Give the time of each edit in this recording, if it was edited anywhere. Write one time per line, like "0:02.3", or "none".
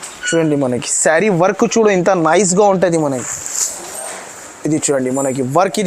none

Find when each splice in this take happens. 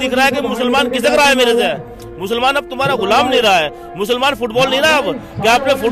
none

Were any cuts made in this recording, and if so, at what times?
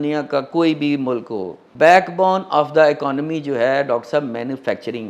0:01.6

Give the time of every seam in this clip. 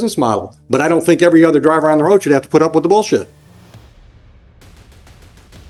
none

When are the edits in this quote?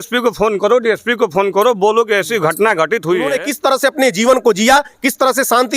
0:03.4

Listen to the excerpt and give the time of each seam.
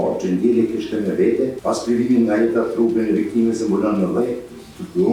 0:01.6

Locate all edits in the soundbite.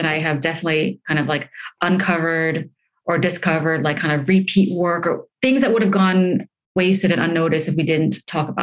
0:06.7

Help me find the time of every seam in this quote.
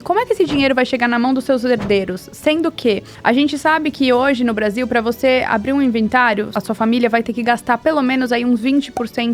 0:03.1
0:06.5

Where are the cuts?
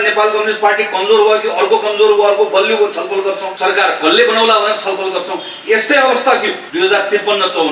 0:03.5
0:06.6

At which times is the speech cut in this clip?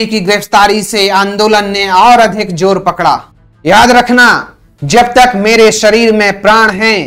0:03.3

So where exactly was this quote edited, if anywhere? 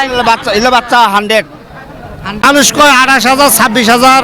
0:02.4

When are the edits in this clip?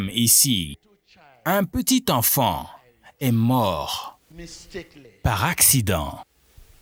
none

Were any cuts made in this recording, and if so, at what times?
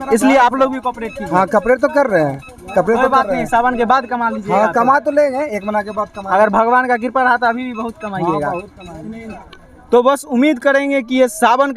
none

